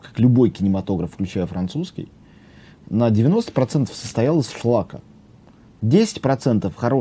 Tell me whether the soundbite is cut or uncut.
uncut